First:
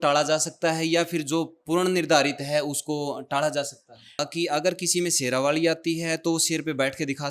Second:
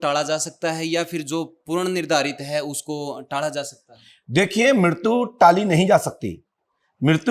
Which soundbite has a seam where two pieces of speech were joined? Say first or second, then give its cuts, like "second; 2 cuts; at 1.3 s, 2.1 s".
first; 1 cut; at 4.2 s